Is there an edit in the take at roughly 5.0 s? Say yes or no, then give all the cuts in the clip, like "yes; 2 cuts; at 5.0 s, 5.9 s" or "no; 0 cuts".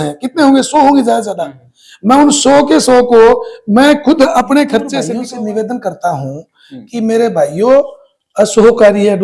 yes; 1 cut; at 5.0 s